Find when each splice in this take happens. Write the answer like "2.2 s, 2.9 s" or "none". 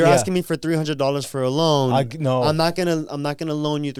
none